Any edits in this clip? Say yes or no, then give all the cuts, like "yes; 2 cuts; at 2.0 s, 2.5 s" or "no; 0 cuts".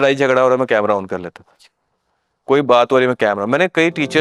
no; 0 cuts